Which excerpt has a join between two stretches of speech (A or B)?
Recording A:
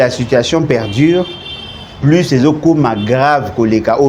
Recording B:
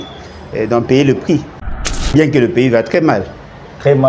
B